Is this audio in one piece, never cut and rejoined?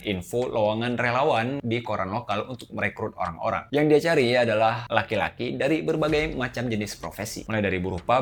yes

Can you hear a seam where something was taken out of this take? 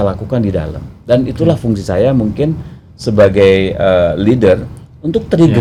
no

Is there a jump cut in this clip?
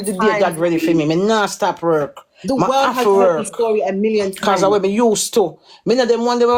no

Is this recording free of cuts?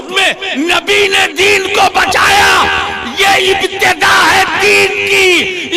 yes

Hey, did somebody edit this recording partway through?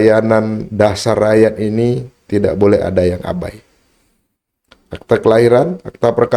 no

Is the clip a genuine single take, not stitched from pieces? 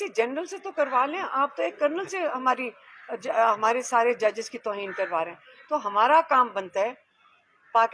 yes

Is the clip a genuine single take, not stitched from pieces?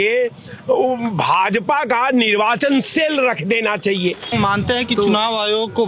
no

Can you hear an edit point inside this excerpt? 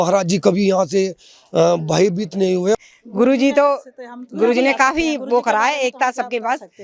yes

